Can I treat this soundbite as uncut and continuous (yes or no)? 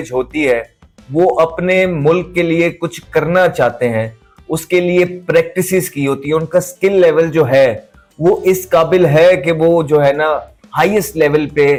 yes